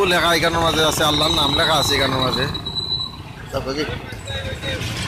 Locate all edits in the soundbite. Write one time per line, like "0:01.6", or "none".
none